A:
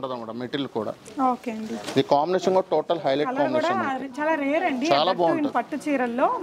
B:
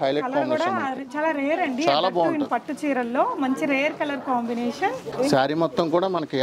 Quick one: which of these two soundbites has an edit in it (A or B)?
B